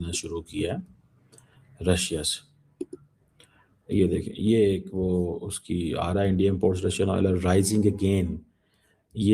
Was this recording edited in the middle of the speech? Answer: no; 0 cuts

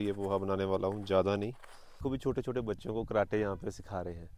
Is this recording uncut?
no; 1 cut; at 2.0 s

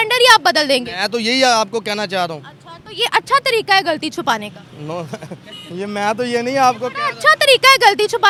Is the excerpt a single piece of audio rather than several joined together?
yes; 0 cuts

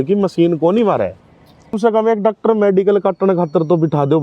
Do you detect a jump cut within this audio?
yes; 1 cut; at 1.8 s

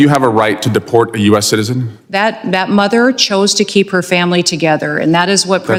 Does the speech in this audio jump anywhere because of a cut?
no; 0 cuts

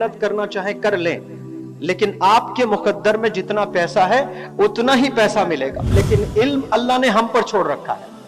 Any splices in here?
yes; 1 cut; at 5.9 s

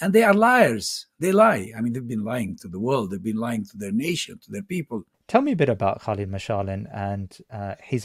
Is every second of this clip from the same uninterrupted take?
no; 1 cut; at 5.1 s

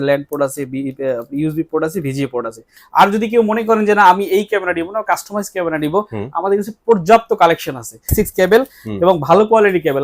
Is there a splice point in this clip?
yes; 2 cuts; at 2.7 s, 8.1 s

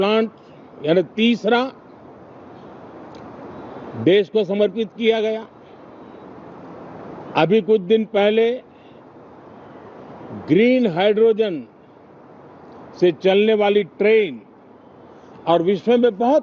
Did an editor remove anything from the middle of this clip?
no; 0 cuts

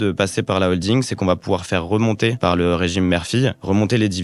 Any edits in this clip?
no; 0 cuts

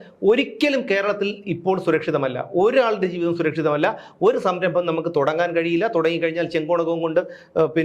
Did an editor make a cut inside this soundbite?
no; 0 cuts

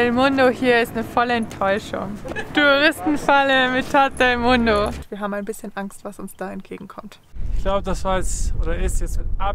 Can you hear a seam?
yes; 3 cuts; at 2.4 s, 5.1 s, 7.5 s

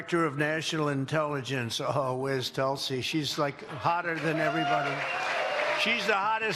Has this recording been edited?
no; 0 cuts

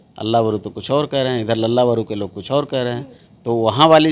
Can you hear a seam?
no; 0 cuts

